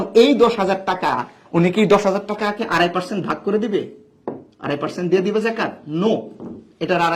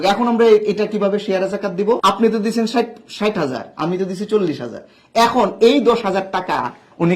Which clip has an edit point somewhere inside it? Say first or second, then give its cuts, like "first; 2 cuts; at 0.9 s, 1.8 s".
second; 1 cut; at 2.0 s